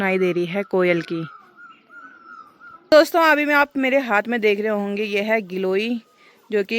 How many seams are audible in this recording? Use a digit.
1